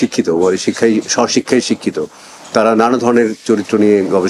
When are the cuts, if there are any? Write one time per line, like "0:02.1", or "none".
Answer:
none